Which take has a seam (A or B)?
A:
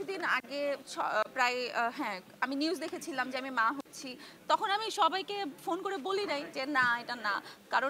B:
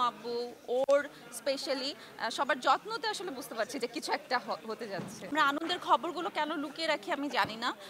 B